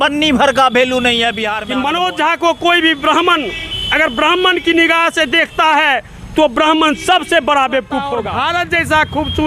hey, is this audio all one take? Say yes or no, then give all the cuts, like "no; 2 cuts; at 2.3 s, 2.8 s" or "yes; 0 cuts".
no; 2 cuts; at 1.5 s, 8.2 s